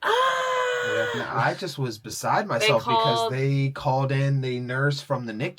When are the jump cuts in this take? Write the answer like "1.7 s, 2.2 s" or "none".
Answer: 1.3 s